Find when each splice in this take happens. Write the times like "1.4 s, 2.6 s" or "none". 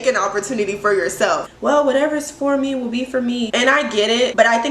1.5 s, 3.5 s